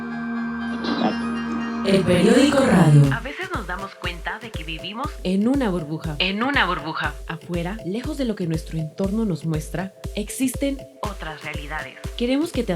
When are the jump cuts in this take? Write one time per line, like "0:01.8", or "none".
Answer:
0:03.2